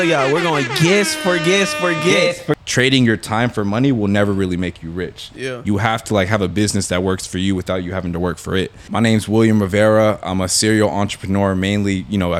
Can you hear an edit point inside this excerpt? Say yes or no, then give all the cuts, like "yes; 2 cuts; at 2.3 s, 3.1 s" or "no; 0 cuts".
yes; 2 cuts; at 2.6 s, 8.8 s